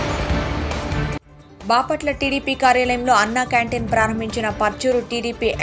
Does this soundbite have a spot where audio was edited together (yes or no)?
yes